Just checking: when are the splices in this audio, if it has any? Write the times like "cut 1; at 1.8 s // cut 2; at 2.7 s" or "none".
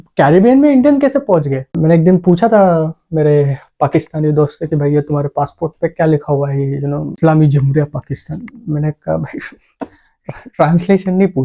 cut 1; at 1.7 s // cut 2; at 7.2 s